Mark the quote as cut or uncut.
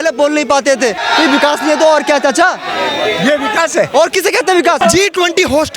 cut